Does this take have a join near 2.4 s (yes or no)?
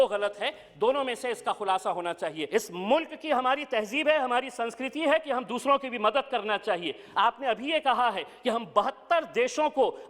yes